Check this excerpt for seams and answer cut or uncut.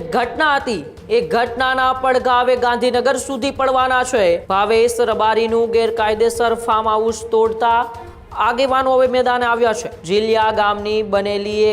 cut